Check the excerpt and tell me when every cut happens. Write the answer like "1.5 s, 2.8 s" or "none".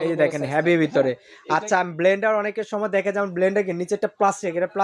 none